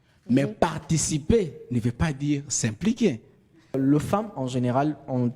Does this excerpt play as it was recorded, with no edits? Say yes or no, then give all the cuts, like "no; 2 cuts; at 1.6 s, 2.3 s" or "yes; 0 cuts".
no; 1 cut; at 3.7 s